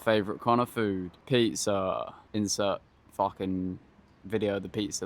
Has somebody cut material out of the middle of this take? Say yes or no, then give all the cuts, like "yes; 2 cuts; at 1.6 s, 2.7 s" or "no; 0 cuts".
yes; 3 cuts; at 1.1 s, 2.2 s, 3.0 s